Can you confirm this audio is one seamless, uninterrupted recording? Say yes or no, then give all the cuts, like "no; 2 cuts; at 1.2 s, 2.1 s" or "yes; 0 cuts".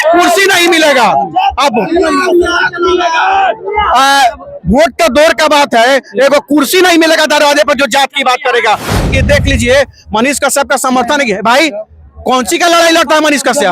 no; 1 cut; at 9.1 s